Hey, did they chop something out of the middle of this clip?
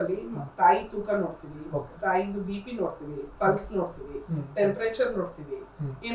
no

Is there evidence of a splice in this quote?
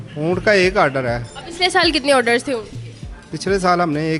no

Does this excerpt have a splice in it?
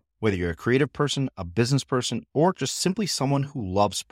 no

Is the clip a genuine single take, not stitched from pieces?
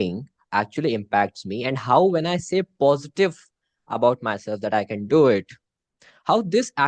yes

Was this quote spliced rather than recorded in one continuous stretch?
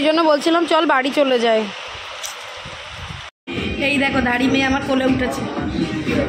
yes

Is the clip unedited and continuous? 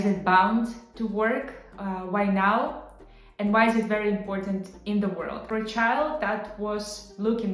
no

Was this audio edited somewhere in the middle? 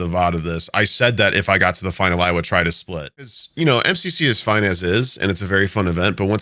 yes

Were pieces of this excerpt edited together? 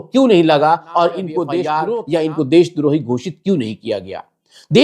yes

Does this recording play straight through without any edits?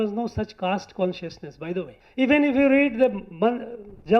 no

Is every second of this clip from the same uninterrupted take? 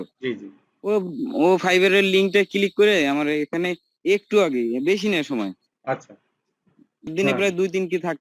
no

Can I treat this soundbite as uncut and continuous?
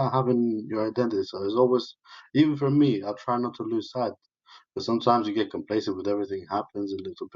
yes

